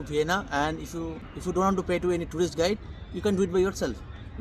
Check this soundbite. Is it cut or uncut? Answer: cut